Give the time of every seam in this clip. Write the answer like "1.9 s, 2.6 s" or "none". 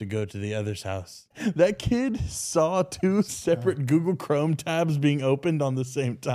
1.3 s, 3.4 s